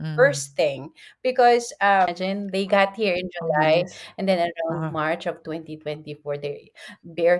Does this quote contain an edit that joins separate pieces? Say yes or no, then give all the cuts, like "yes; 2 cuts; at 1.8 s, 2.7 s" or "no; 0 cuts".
yes; 1 cut; at 2.1 s